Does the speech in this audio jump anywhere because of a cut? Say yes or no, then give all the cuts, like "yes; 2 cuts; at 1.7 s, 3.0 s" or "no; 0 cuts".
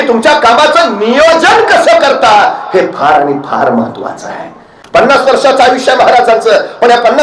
no; 0 cuts